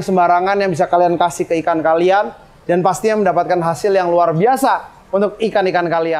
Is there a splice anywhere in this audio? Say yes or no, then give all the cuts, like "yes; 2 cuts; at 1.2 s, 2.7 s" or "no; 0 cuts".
no; 0 cuts